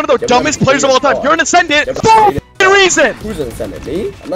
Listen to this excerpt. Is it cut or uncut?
cut